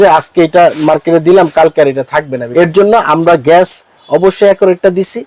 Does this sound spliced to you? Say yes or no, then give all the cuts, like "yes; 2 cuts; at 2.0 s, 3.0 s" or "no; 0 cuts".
yes; 1 cut; at 2.4 s